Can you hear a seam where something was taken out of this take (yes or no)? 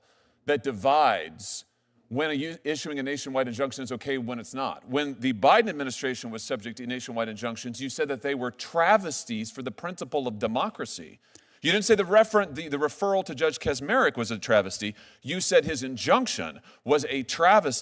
no